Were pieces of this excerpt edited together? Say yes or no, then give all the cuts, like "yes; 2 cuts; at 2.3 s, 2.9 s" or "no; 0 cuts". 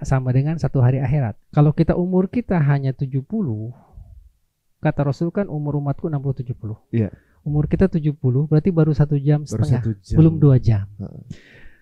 yes; 1 cut; at 1.4 s